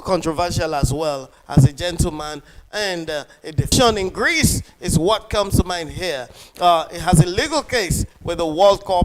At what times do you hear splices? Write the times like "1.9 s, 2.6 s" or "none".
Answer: 3.7 s